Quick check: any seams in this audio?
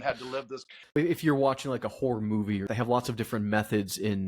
yes; 2 cuts; at 1.0 s, 2.7 s

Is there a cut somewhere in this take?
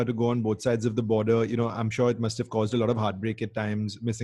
no; 0 cuts

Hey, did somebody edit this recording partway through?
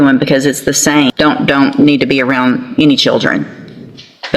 yes; 1 cut; at 1.1 s

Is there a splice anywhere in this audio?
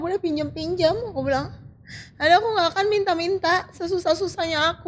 no; 0 cuts

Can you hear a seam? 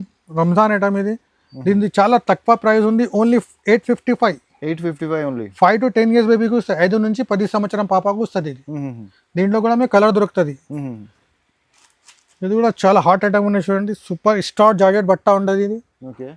no; 0 cuts

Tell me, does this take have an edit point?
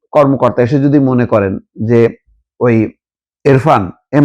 no; 0 cuts

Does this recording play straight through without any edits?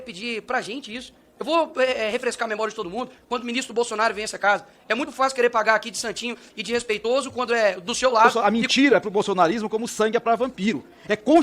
no; 2 cuts; at 3.2 s, 8.3 s

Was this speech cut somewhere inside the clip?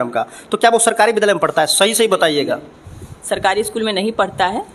no; 0 cuts

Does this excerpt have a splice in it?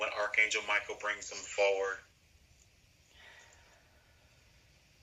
yes; 1 cut; at 3.5 s

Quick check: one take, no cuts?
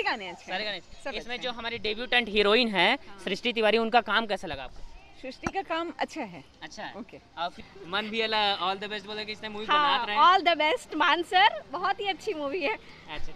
no; 1 cut; at 7.6 s

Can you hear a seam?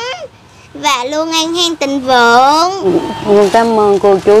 yes; 1 cut; at 2.9 s

